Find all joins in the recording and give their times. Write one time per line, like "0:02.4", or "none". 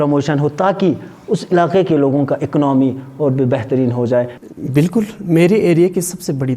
0:04.4